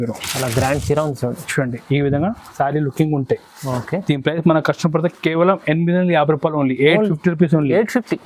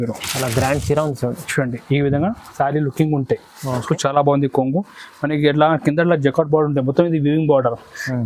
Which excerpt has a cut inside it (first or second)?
second